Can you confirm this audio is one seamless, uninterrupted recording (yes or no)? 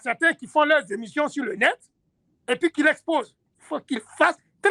yes